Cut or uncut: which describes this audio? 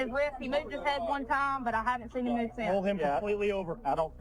uncut